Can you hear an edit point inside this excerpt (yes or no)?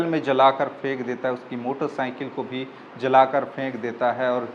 no